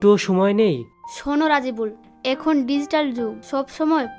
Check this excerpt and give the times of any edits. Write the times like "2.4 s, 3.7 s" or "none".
none

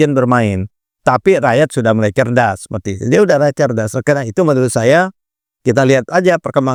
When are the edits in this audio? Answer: none

